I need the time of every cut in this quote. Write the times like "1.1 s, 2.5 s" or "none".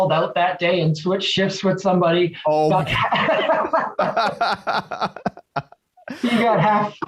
none